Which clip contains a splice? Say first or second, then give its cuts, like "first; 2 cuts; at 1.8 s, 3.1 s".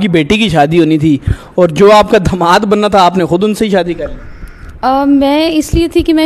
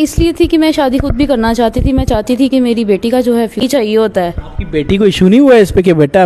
second; 1 cut; at 3.6 s